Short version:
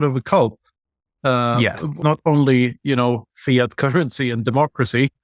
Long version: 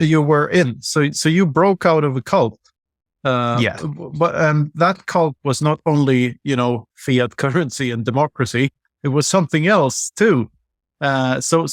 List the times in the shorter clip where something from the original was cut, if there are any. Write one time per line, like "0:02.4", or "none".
0:02.0